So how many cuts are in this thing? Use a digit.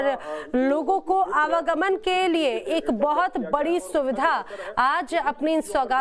1